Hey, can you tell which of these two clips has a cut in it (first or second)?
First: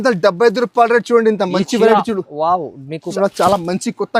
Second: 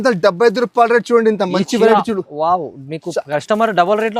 first